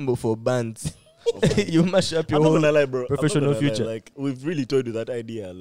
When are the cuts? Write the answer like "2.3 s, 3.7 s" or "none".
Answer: 4.1 s